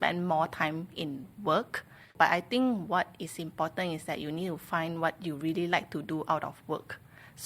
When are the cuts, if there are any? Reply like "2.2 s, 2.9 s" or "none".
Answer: 2.0 s